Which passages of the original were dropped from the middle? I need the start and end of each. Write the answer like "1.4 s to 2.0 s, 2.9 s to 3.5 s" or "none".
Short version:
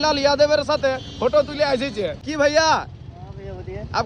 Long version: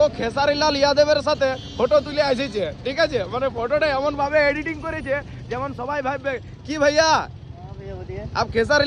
2.8 s to 6.6 s